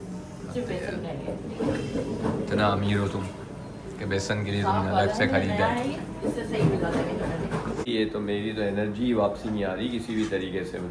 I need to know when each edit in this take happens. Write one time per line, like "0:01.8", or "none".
0:07.9

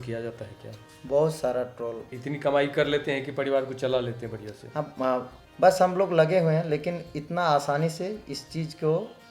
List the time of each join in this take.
0:02.2
0:05.4

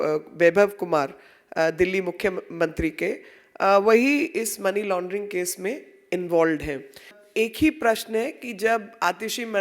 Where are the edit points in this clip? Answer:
0:07.2

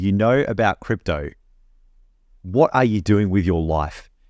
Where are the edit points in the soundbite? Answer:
none

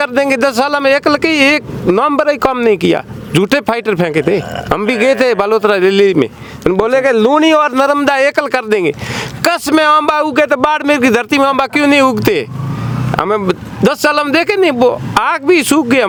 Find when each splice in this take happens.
none

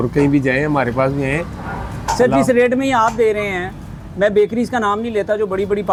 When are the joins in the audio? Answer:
none

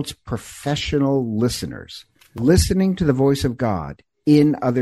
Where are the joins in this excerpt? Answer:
0:02.3

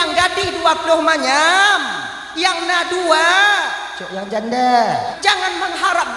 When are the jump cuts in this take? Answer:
0:05.1

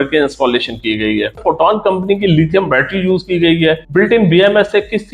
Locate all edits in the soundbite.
0:01.4
0:03.8

